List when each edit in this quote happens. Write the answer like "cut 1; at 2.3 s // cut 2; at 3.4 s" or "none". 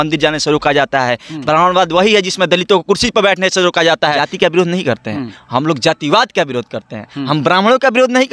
cut 1; at 4.3 s